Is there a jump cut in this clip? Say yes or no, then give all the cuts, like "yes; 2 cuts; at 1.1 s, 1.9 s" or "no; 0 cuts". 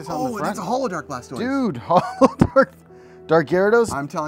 no; 0 cuts